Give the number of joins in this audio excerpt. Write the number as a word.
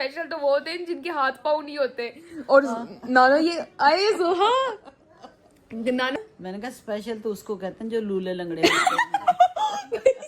one